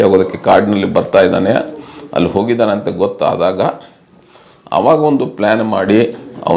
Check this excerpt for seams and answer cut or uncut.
uncut